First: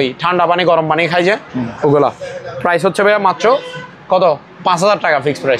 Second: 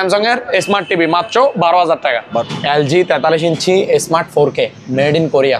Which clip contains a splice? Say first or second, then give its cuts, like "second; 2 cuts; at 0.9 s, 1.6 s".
second; 1 cut; at 2.4 s